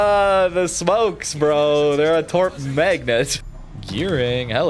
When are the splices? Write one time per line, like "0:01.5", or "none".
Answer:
0:03.3